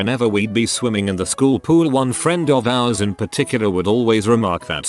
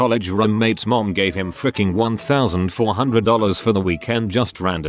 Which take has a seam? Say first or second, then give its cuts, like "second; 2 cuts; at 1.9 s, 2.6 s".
second; 2 cuts; at 2.4 s, 3.9 s